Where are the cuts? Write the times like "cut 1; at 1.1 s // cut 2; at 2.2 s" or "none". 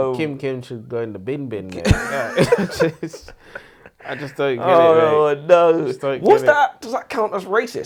none

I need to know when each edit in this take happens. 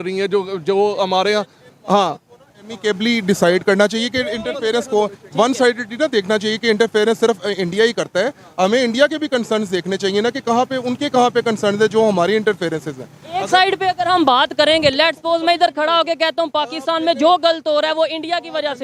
none

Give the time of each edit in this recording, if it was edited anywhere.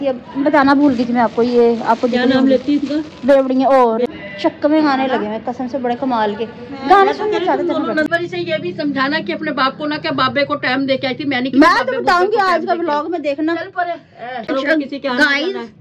cut 1; at 4.1 s // cut 2; at 8.1 s // cut 3; at 12.0 s // cut 4; at 14.5 s

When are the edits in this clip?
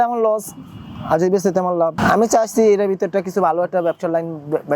cut 1; at 1.9 s

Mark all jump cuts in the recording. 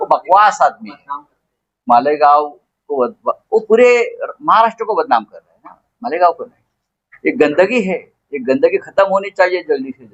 none

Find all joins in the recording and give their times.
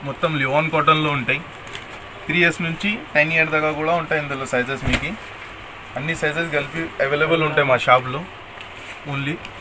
none

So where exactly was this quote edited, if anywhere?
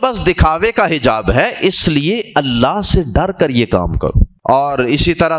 cut 1; at 4.3 s

